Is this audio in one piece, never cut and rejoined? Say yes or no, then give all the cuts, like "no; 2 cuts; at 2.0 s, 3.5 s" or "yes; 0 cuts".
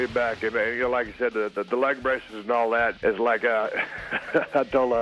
no; 1 cut; at 3.0 s